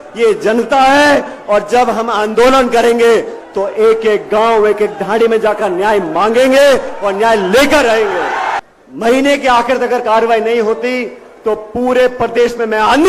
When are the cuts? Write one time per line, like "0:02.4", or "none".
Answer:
0:08.6